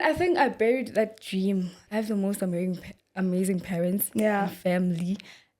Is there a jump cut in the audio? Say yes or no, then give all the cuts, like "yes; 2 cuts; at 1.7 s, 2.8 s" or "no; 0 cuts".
yes; 1 cut; at 1.8 s